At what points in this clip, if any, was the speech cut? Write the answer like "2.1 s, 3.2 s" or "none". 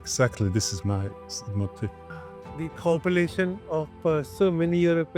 2.1 s